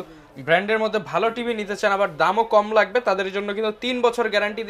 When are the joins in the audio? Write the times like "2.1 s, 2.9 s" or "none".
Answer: none